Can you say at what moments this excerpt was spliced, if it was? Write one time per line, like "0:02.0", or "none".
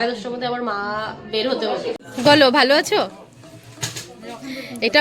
0:02.0